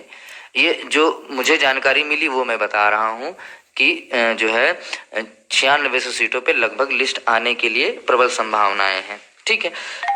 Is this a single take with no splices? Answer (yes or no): yes